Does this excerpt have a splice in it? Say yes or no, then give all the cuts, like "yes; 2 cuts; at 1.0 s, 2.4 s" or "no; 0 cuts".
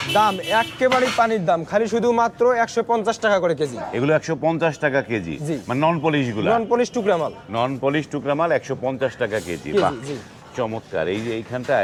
no; 0 cuts